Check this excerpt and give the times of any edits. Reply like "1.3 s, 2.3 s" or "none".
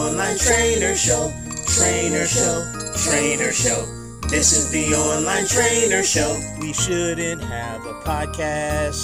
none

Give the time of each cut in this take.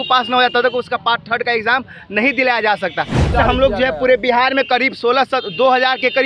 3.3 s

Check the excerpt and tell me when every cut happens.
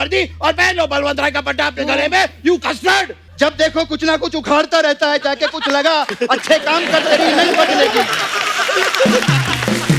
3.2 s

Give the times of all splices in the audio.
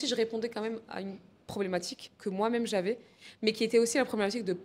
2.0 s

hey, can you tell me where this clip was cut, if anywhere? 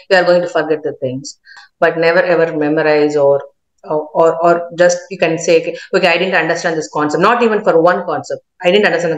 1.6 s

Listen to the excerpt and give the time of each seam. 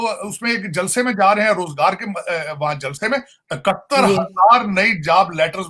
none

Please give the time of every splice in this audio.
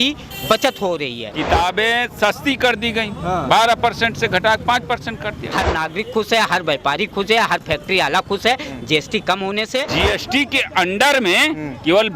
1.3 s, 5.4 s, 9.9 s

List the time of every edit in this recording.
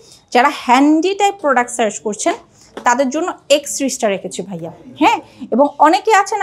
none

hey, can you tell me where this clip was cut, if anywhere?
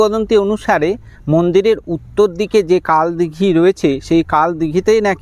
none

